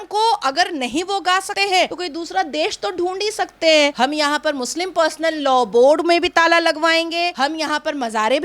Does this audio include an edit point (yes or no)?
yes